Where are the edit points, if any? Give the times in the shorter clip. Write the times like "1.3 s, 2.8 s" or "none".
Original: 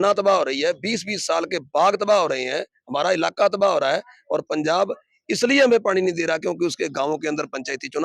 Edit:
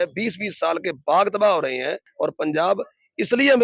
2.1 s